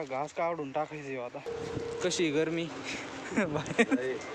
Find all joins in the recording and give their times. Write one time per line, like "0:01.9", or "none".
0:01.5